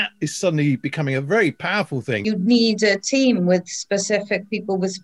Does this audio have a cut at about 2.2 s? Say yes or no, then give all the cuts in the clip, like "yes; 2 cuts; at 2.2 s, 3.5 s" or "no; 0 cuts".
yes; 1 cut; at 2.2 s